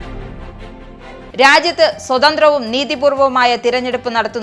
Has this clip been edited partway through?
no; 0 cuts

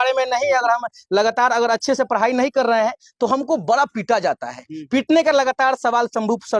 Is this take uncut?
yes; 0 cuts

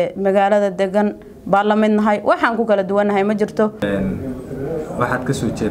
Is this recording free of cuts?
no; 1 cut; at 3.8 s

